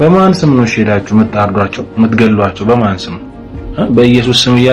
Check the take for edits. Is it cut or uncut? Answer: uncut